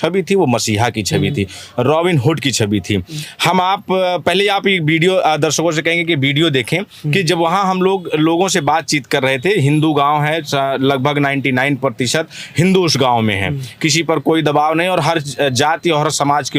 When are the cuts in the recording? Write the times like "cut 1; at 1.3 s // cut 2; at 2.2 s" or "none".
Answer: none